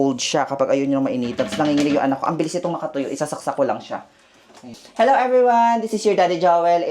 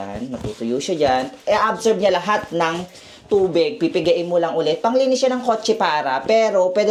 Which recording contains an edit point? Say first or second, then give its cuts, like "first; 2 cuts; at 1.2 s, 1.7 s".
first; 1 cut; at 4.8 s